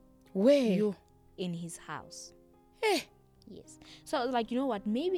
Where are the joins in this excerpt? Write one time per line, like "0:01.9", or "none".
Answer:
none

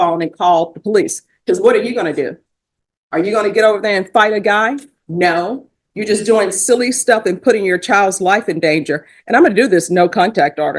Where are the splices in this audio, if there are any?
none

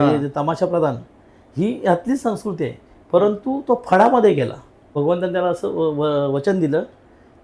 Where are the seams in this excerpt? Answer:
0:04.9

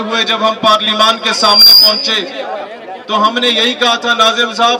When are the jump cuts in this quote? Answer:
none

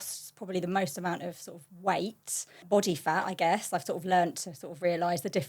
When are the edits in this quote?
0:02.6

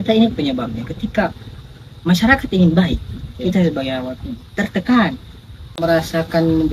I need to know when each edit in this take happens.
0:05.8

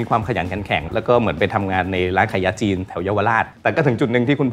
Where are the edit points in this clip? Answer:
0:00.9
0:03.5

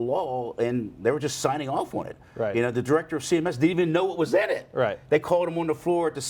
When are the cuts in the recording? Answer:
none

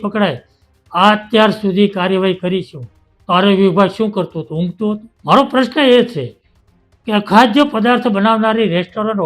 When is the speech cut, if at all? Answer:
0:05.1

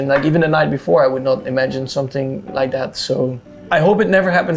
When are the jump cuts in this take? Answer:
0:03.5

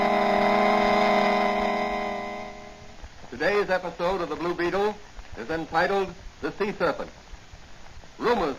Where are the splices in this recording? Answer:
0:06.6

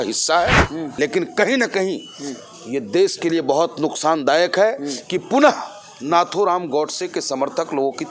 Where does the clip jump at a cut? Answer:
0:00.9

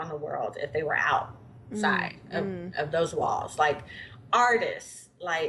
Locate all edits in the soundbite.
none

